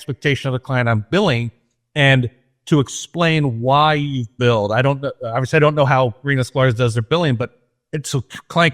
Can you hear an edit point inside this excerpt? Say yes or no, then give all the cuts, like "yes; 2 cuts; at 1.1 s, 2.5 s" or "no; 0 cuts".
no; 0 cuts